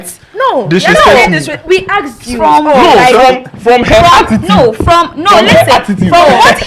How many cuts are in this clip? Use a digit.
0